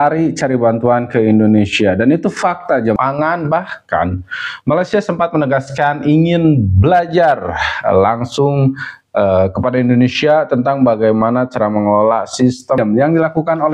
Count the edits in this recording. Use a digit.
2